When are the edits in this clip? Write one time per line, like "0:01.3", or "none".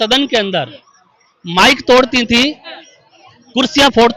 none

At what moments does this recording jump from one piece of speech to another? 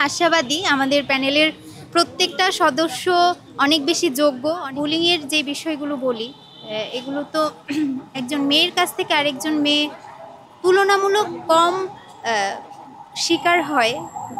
0:04.6

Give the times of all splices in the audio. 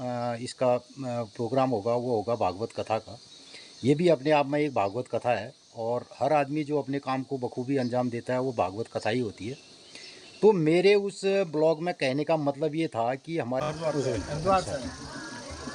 0:13.6

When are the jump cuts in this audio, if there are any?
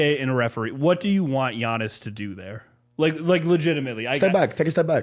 none

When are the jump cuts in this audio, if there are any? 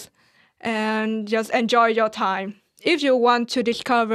0:02.8

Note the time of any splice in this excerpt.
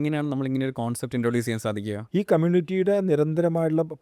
0:02.0

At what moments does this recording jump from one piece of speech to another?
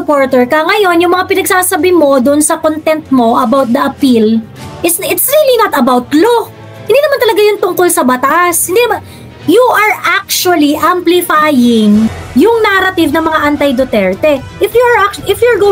none

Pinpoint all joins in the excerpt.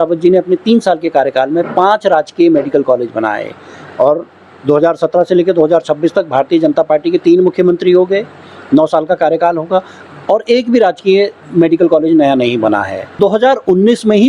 0:13.1

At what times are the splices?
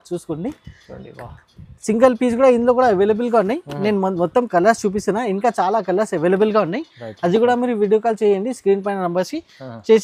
none

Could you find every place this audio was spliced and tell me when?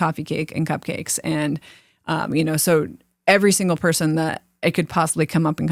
none

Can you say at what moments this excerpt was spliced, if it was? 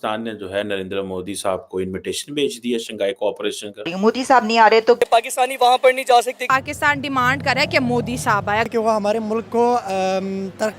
0:03.9
0:05.0
0:06.4
0:08.6

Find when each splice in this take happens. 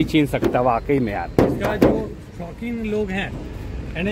none

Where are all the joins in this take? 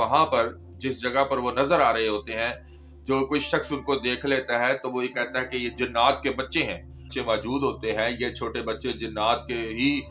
0:07.1

